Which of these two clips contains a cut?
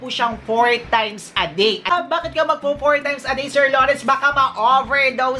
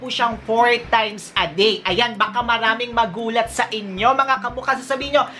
first; 1 cut; at 1.9 s

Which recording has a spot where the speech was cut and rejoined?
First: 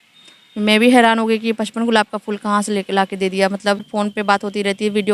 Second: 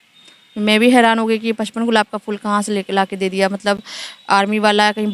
first; 1 cut; at 3.9 s

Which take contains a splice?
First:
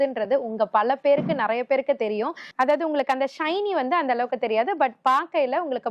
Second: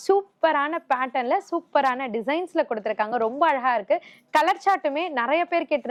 first; 1 cut; at 2.4 s

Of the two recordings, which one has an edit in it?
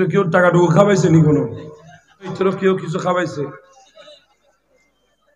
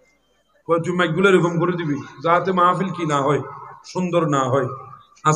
first; 1 cut; at 2.3 s

